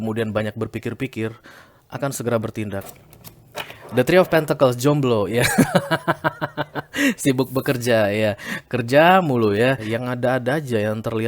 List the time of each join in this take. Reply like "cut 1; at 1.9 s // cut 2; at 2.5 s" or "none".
cut 1; at 2.9 s // cut 2; at 9.9 s